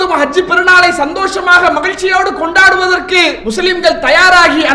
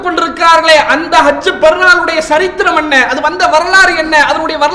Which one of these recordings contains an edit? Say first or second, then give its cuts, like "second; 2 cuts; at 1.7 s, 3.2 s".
first; 1 cut; at 3.4 s